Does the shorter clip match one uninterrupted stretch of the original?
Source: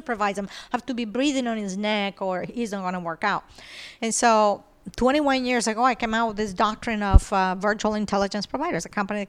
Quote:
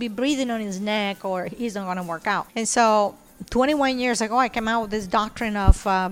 no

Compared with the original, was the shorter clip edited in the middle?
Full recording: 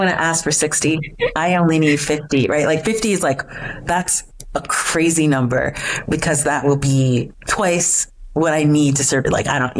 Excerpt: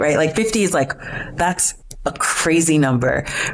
no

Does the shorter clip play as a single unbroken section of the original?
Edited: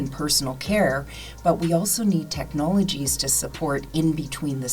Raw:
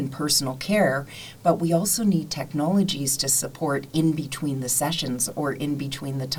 yes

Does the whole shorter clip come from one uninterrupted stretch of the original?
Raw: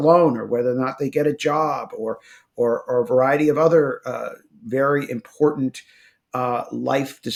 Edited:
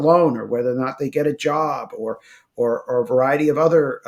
yes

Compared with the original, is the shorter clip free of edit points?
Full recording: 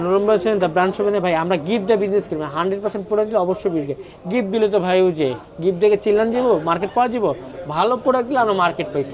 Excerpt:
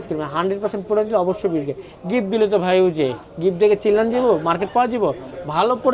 yes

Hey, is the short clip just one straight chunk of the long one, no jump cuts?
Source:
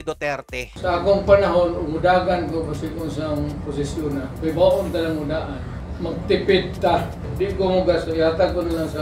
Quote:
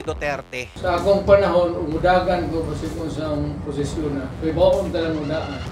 yes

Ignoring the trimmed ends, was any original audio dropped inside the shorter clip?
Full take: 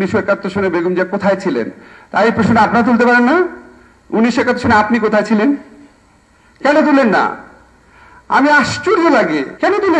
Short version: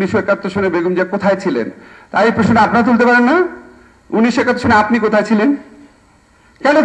no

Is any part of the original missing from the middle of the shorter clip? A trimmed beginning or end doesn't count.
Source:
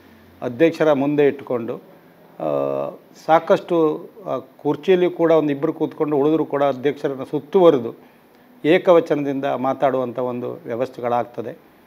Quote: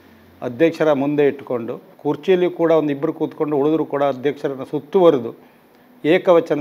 yes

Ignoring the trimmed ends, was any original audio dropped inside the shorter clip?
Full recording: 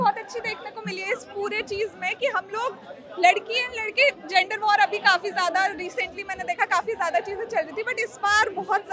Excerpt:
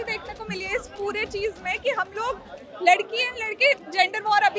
no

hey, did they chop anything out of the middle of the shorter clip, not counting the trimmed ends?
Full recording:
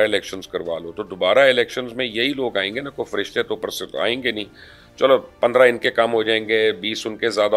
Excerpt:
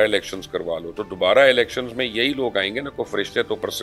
no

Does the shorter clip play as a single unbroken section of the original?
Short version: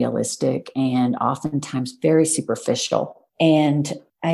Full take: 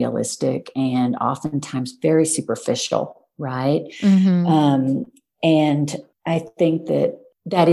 no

